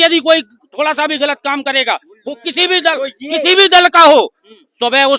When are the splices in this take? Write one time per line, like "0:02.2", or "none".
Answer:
none